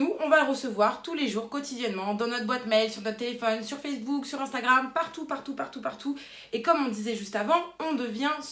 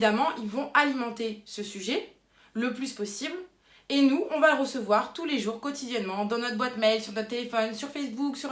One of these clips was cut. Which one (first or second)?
first